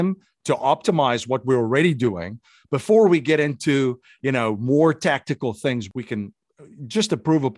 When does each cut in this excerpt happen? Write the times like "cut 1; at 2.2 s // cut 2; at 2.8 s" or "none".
cut 1; at 5.9 s